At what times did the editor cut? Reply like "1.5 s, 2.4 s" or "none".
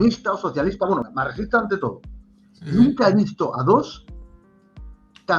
1.0 s